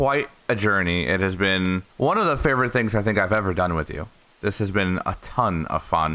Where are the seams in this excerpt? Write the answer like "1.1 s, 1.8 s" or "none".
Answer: 1.9 s